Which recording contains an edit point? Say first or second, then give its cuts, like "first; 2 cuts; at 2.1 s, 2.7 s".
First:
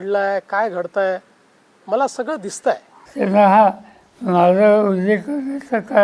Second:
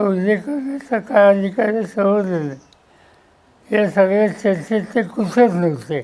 first; 1 cut; at 3.0 s